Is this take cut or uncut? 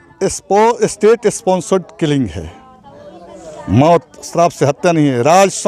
uncut